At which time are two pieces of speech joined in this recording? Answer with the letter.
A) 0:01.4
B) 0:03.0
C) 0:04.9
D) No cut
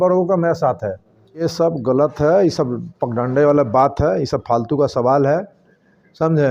A